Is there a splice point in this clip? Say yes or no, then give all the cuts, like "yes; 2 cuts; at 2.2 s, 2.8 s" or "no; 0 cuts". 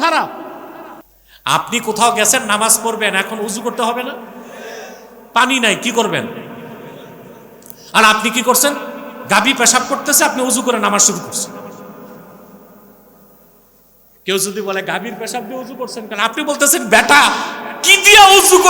no; 0 cuts